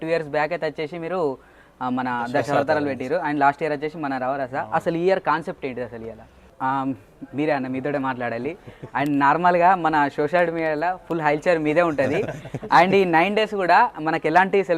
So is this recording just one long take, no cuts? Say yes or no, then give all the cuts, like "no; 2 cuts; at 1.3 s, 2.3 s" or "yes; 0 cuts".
no; 1 cut; at 6.4 s